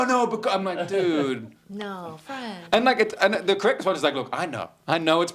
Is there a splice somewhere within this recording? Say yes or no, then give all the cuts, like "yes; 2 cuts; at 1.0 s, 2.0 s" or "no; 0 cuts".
no; 0 cuts